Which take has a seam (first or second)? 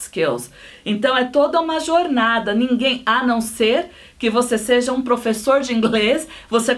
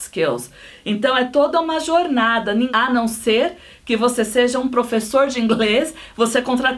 second